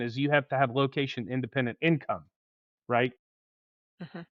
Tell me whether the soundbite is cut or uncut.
uncut